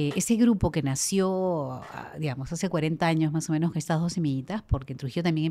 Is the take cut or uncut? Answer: uncut